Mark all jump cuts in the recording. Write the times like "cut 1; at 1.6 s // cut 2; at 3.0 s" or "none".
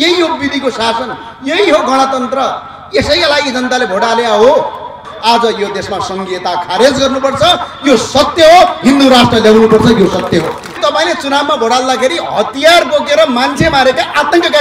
cut 1; at 5.1 s // cut 2; at 10.8 s